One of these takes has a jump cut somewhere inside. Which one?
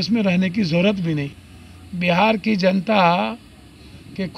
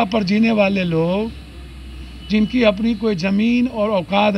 first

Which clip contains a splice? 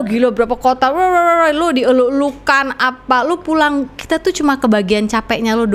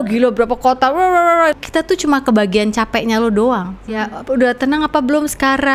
second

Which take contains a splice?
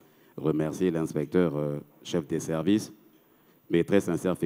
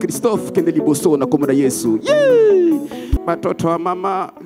second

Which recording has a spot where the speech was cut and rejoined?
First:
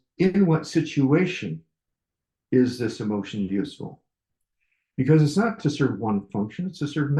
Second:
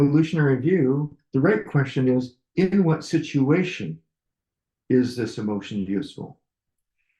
second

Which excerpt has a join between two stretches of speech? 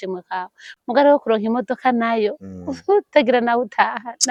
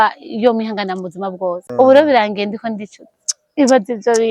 second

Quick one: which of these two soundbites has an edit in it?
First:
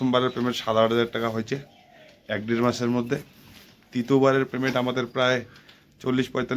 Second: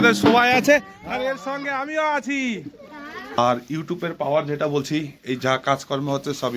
second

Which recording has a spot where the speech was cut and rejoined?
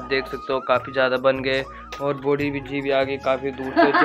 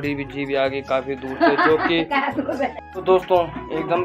second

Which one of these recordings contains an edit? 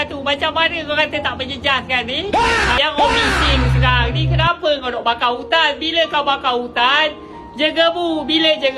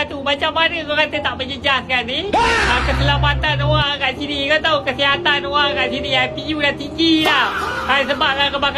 first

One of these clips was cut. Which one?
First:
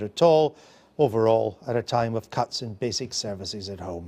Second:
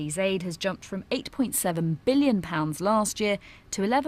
second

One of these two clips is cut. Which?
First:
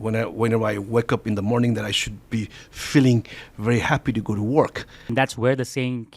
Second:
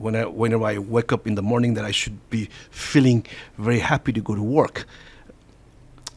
first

